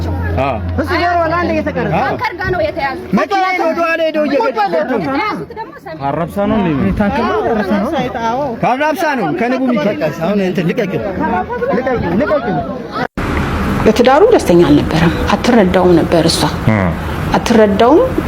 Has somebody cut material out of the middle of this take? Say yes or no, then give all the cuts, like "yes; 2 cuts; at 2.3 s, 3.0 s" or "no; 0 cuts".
yes; 1 cut; at 12.8 s